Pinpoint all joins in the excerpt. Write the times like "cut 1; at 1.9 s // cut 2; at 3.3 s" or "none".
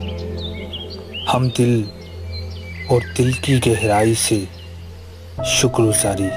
cut 1; at 1.2 s